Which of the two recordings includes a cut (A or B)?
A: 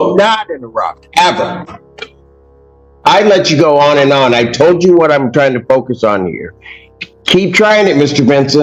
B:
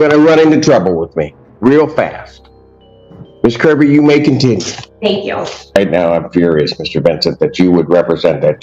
B